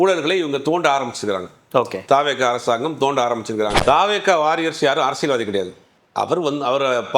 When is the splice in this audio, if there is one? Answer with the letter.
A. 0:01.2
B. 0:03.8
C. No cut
B